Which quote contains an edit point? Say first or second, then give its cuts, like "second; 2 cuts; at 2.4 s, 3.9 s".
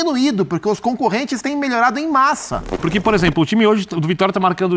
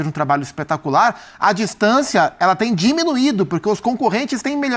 first; 1 cut; at 2.8 s